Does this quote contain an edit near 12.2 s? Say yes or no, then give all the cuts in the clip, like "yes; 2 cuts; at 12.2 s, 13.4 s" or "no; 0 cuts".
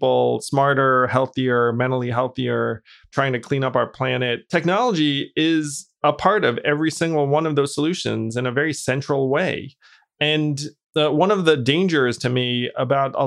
no; 2 cuts; at 3.1 s, 4.5 s